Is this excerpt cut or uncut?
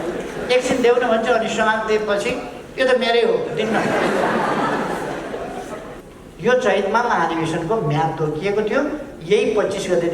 cut